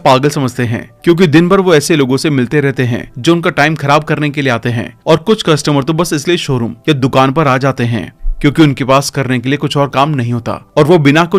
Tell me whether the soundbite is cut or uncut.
uncut